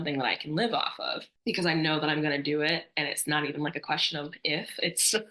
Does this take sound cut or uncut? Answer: uncut